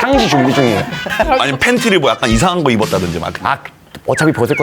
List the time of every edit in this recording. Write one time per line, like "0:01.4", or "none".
0:01.3